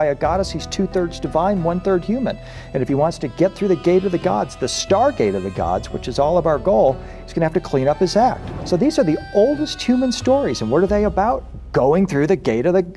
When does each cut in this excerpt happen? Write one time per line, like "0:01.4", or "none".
0:08.5